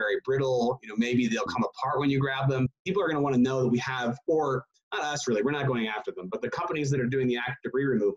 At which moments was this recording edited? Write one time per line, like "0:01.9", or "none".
0:02.7